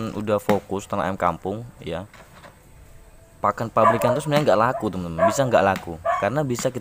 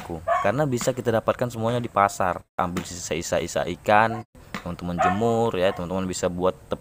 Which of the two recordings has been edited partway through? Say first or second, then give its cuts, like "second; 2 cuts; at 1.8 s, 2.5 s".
second; 2 cuts; at 2.5 s, 4.5 s